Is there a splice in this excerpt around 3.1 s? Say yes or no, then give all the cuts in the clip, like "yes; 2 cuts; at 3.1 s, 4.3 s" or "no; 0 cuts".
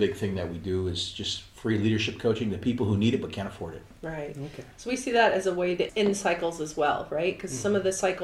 no; 1 cut; at 5.9 s